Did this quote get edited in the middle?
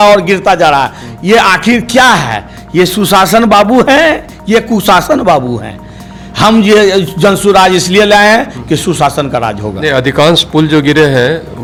no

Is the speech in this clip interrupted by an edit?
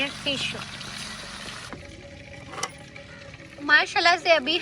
yes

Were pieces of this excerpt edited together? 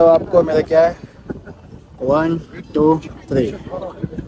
no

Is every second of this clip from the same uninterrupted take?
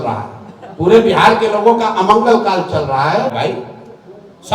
no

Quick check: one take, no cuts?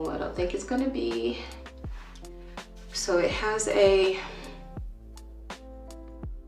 yes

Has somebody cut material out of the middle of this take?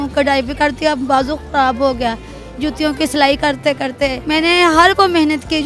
yes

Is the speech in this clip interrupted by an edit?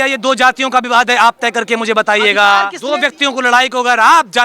yes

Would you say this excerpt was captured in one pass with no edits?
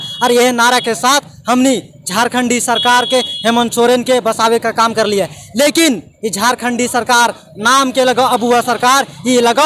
yes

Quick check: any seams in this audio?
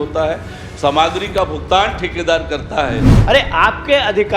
yes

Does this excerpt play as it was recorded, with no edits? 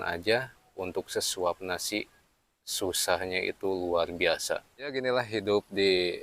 no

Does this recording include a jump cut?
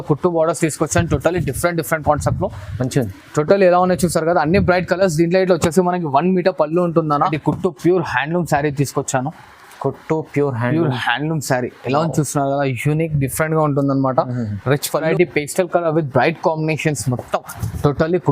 yes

